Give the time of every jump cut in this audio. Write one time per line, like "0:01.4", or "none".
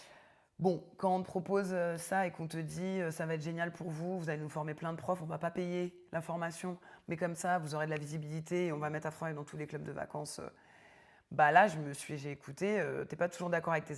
none